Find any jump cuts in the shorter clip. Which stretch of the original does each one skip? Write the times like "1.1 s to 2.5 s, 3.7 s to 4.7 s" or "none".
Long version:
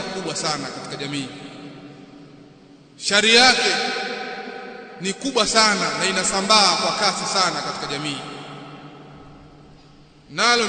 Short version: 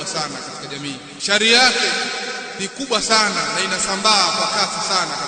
1.4 s to 2.9 s, 4.3 s to 4.9 s